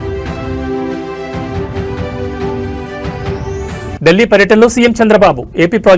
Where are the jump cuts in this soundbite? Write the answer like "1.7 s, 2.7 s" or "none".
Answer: 3.9 s